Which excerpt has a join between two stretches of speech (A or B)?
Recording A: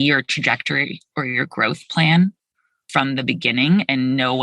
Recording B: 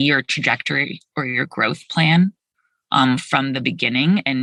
A